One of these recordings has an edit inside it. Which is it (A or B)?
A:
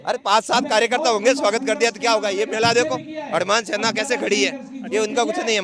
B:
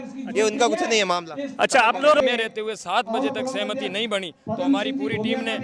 B